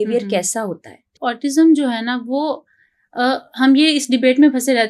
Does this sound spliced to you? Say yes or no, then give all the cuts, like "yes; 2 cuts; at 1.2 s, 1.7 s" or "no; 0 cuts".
yes; 1 cut; at 1.1 s